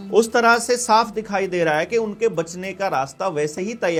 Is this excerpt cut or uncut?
uncut